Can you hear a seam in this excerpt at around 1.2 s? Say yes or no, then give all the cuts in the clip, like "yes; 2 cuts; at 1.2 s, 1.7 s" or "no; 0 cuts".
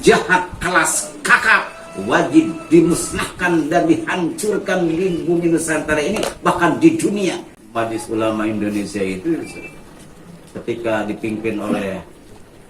no; 1 cut; at 7.6 s